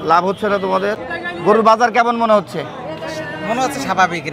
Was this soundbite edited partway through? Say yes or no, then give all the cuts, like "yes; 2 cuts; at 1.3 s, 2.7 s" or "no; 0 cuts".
yes; 1 cut; at 1.0 s